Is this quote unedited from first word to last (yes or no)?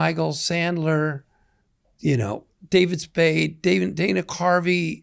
yes